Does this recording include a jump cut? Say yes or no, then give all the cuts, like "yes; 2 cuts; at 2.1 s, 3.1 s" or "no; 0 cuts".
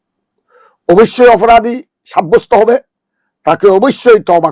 no; 0 cuts